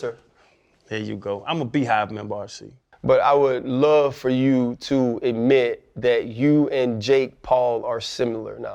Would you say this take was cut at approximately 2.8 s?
yes; 1 cut; at 2.8 s

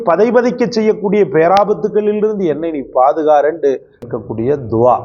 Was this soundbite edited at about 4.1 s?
yes; 1 cut; at 4.1 s

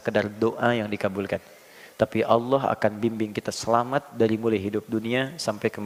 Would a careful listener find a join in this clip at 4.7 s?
no; 0 cuts

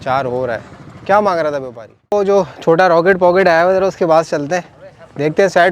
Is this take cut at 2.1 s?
yes; 1 cut; at 2.1 s

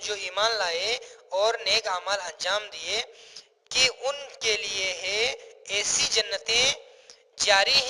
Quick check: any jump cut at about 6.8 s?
yes; 1 cut; at 6.8 s

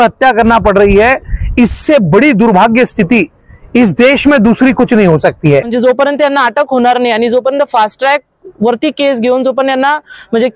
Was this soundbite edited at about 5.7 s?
yes; 1 cut; at 5.7 s

